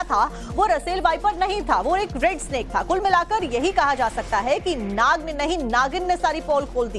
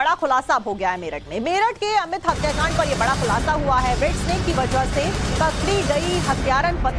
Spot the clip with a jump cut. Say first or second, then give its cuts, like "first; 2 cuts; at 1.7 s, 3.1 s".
first; 1 cut; at 4.9 s